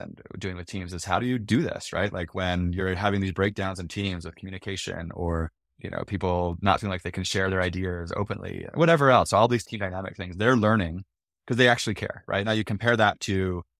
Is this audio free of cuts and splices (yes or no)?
no